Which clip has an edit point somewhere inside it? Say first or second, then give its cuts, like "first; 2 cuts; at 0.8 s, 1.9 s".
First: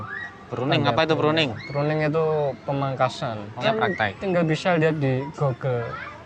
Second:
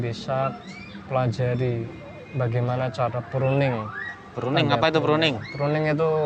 first; 1 cut; at 3.6 s